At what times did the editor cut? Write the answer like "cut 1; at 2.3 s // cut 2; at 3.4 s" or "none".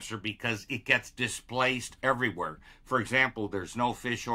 none